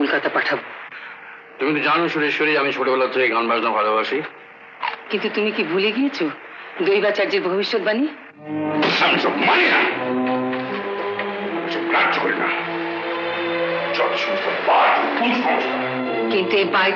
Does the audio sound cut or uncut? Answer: uncut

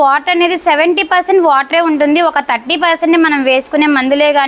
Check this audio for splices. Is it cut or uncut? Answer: uncut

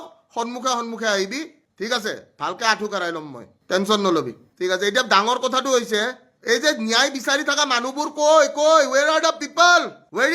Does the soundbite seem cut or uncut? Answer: uncut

